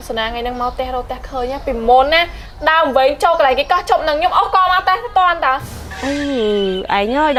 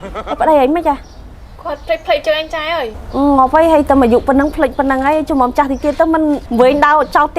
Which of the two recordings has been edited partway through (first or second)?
second